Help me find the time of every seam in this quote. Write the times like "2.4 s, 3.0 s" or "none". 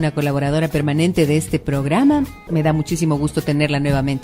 1.9 s